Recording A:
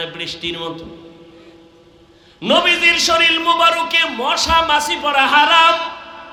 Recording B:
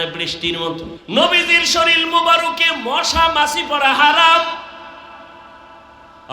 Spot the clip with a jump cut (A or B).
B